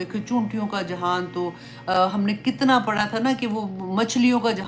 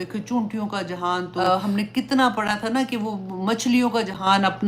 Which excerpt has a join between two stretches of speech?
second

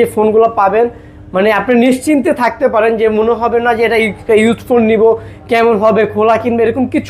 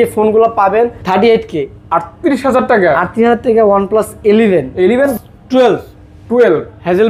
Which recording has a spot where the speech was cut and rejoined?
second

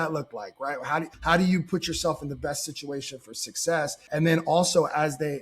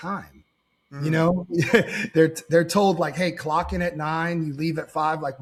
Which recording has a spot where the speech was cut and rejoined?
first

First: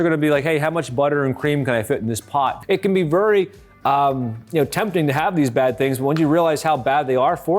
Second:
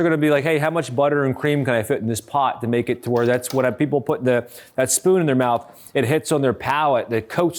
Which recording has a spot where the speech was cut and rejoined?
first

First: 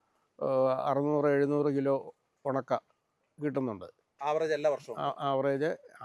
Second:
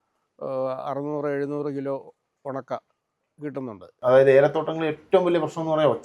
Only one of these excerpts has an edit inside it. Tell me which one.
second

